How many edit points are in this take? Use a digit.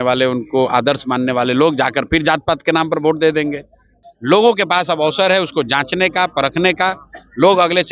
1